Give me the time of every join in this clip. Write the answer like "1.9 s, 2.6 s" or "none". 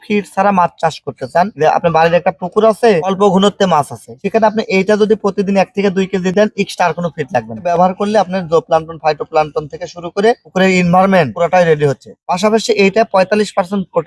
7.6 s